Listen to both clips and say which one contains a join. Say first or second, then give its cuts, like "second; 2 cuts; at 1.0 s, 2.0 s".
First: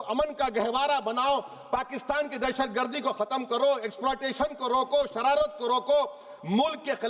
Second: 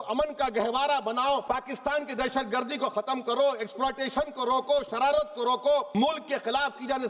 second; 2 cuts; at 1.4 s, 5.9 s